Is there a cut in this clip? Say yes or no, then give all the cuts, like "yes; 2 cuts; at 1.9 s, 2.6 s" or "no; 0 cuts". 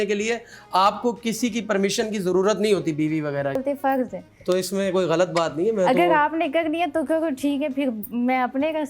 yes; 1 cut; at 3.6 s